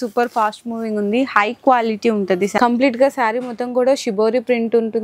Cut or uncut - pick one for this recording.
cut